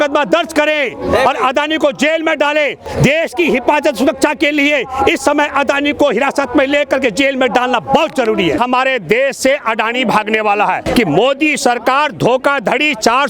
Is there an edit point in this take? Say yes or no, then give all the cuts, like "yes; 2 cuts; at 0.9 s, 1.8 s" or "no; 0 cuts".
yes; 3 cuts; at 2.8 s, 8.6 s, 10.9 s